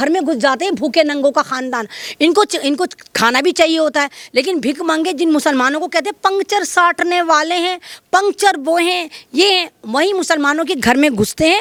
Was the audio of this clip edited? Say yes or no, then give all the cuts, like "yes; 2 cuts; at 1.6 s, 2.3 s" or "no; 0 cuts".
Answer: no; 0 cuts